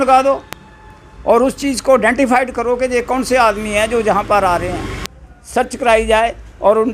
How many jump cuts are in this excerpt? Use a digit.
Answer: 1